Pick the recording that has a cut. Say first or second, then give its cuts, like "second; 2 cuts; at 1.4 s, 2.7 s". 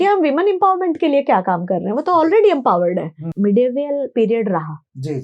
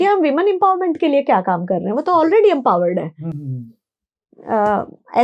first; 1 cut; at 3.3 s